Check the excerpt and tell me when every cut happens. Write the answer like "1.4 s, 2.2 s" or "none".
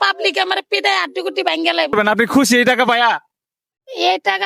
1.9 s

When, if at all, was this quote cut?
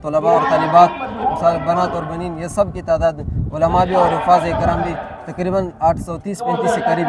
none

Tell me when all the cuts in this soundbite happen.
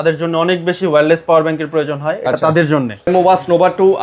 3.1 s

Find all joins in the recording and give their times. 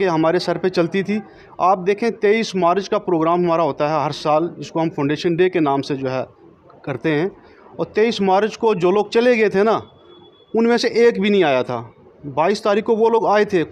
none

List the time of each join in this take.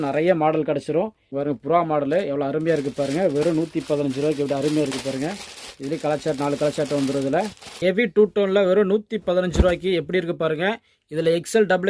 1.2 s, 7.8 s

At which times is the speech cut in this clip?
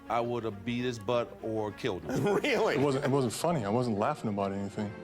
2.7 s

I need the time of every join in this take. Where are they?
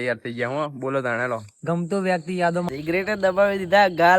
2.7 s

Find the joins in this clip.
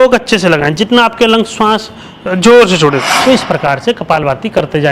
3.1 s

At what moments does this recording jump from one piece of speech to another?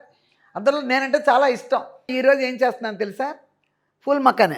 2.1 s

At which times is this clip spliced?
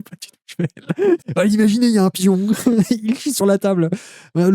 1.2 s

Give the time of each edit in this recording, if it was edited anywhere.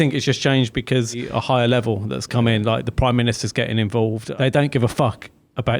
1.3 s, 4.2 s

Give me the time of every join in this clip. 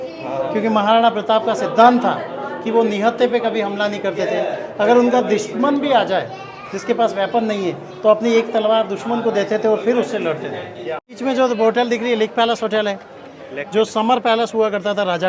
11.2 s

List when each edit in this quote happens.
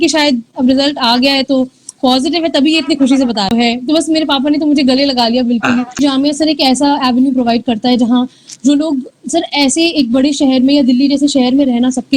3.5 s, 6.0 s

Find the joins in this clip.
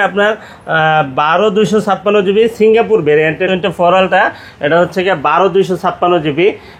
3.4 s

